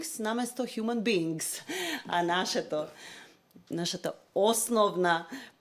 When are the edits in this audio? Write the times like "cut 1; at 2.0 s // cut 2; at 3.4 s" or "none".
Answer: none